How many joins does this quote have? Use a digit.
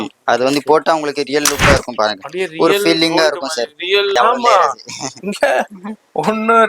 1